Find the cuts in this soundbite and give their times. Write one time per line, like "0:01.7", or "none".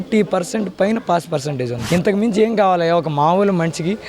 0:01.8